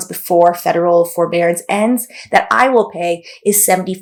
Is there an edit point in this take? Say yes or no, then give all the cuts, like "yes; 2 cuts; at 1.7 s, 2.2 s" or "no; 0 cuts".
no; 0 cuts